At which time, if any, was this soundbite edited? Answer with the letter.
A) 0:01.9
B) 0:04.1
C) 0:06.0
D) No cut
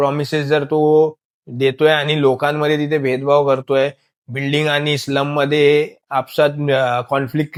D